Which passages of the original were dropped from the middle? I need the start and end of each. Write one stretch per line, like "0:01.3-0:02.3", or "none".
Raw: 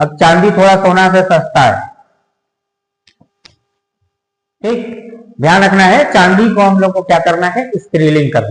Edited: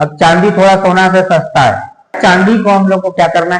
0:02.2-0:06.1